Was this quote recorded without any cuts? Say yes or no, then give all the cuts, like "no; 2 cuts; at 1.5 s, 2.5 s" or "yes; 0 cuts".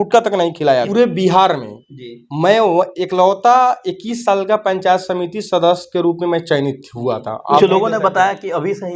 no; 2 cuts; at 0.9 s, 7.6 s